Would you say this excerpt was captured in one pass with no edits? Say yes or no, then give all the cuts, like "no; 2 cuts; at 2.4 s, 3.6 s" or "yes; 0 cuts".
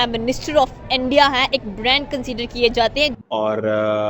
no; 1 cut; at 3.0 s